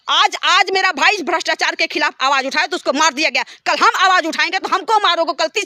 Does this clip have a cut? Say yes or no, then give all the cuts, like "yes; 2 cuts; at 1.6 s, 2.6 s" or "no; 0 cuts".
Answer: no; 0 cuts